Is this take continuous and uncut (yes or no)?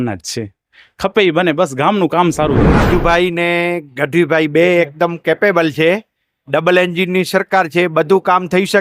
no